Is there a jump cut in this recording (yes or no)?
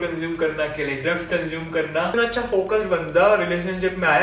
yes